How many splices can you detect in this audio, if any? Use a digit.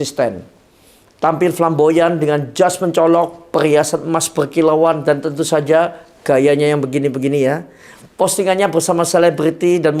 0